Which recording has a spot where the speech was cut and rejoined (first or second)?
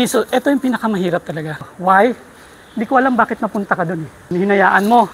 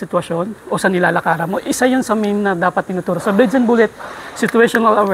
first